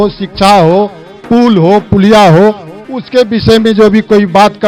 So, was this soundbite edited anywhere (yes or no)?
no